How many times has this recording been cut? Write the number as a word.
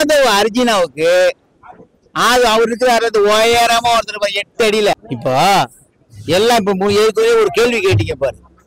one